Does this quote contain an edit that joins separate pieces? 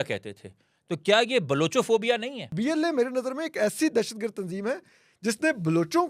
yes; 1 cut; at 2.5 s

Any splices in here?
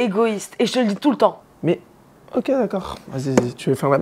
yes; 1 cut; at 1.5 s

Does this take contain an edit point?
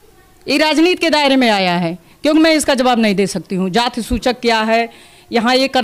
no; 0 cuts

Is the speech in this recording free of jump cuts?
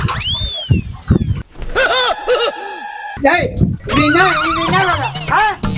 yes; 0 cuts

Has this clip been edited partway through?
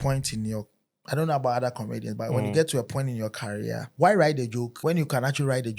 yes; 2 cuts; at 3.9 s, 4.7 s

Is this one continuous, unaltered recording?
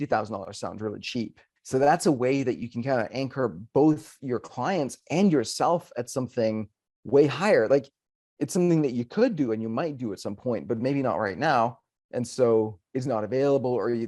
no; 1 cut; at 1.4 s

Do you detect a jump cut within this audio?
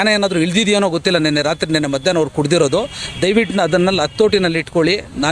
no; 0 cuts

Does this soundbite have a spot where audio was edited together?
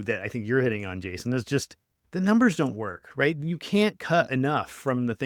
no; 0 cuts

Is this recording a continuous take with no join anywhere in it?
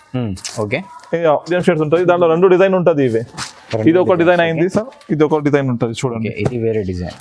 no; 1 cut; at 1.5 s

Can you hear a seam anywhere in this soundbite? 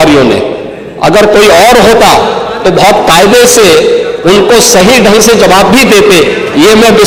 no; 0 cuts

